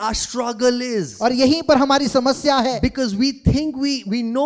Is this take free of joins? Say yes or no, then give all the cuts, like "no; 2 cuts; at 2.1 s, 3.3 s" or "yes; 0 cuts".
yes; 0 cuts